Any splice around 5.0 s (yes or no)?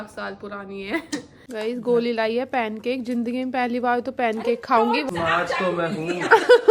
yes